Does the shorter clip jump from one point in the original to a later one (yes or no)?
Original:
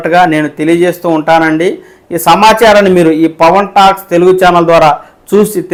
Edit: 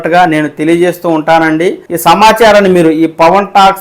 yes